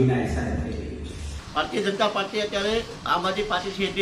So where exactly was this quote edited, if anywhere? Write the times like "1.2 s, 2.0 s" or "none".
1.4 s